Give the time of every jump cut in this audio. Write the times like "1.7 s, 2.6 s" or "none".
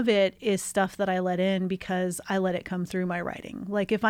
none